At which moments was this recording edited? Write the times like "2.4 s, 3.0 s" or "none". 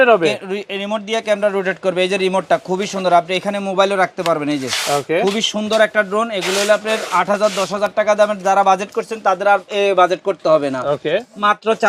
none